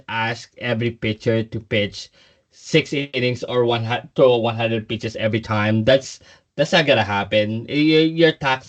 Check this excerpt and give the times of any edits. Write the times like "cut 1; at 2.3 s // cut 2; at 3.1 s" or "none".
none